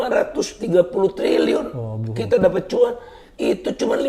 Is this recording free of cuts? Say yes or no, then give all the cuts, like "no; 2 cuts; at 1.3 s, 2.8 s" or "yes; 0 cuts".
yes; 0 cuts